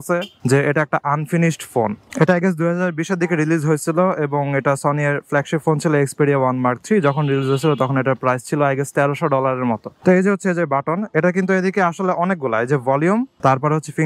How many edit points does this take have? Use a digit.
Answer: 1